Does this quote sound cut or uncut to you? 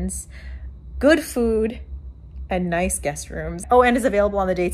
cut